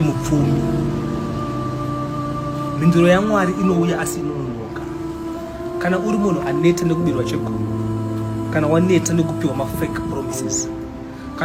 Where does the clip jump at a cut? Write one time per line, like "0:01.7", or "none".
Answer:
none